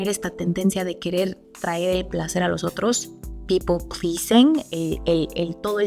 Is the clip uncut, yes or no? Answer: yes